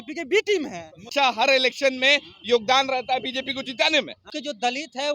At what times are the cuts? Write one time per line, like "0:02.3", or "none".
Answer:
0:01.1
0:04.2